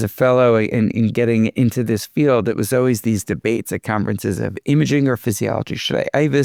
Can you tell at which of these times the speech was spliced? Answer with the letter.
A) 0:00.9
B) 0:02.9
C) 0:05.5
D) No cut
D